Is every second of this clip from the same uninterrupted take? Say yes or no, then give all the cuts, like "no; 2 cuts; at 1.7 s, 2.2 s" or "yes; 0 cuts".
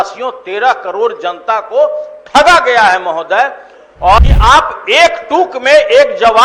no; 1 cut; at 4.2 s